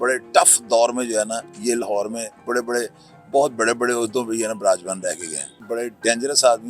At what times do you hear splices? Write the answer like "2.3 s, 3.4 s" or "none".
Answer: 5.6 s